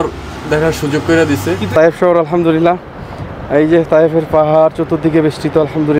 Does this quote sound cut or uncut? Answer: cut